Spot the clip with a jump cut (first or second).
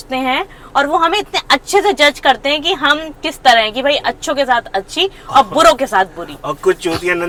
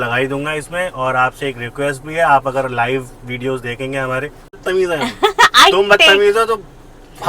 second